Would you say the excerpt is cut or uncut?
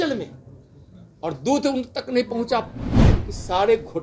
cut